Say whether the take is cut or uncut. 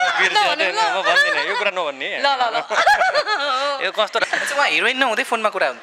cut